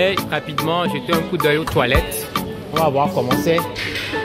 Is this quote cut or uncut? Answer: uncut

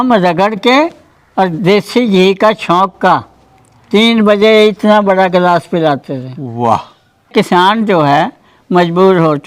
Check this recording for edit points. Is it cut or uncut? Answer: cut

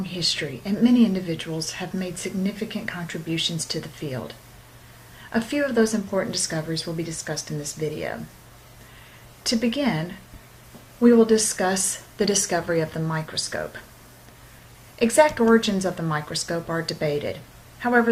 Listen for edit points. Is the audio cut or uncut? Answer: uncut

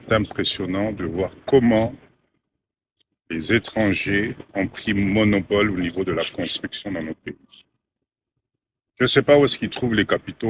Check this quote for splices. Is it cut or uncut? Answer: uncut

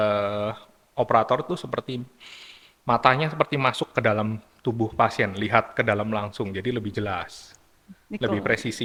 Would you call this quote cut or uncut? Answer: uncut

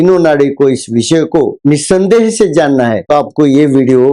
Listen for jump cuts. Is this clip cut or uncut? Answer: uncut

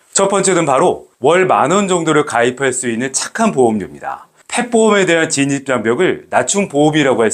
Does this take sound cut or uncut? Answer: cut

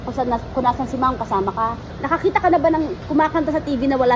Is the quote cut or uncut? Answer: cut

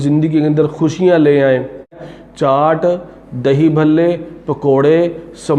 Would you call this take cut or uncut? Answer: cut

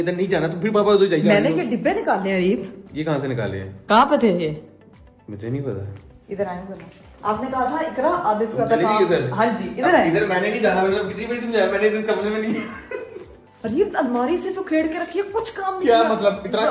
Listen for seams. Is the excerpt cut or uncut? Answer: uncut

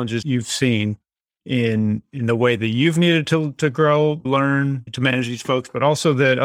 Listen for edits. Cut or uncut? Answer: cut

